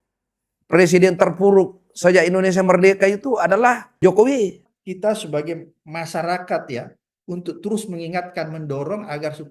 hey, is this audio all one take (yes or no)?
no